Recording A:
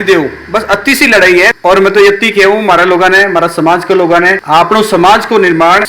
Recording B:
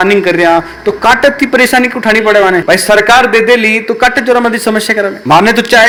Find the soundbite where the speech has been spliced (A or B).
A